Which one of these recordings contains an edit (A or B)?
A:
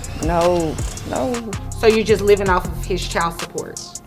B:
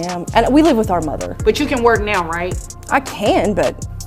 B